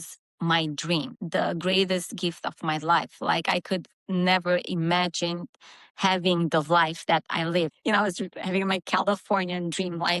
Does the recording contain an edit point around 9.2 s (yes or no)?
no